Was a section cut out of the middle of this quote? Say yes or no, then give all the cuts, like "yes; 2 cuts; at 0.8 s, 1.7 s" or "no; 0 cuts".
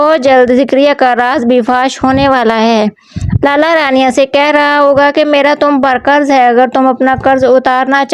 yes; 1 cut; at 4.5 s